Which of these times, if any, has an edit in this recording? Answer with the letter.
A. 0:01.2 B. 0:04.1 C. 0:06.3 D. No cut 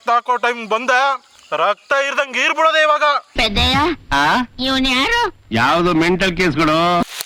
D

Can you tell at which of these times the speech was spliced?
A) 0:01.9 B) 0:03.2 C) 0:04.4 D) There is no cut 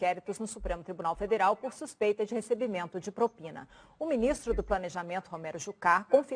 C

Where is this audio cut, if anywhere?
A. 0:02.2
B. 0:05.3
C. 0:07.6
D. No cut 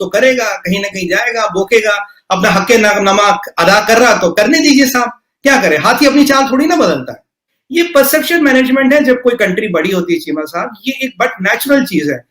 C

